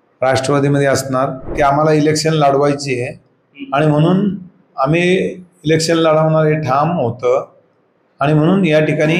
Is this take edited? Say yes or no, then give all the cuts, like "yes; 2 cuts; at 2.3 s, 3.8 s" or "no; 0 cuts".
yes; 1 cut; at 1.5 s